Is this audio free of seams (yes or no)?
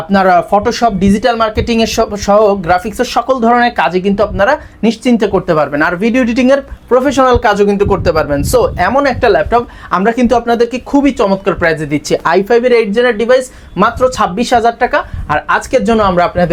yes